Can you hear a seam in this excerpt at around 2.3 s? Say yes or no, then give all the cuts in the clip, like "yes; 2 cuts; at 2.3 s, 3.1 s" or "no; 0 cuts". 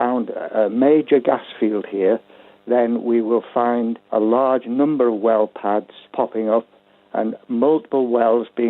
no; 2 cuts; at 4.0 s, 6.1 s